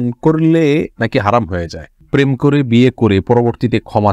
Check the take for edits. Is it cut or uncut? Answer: cut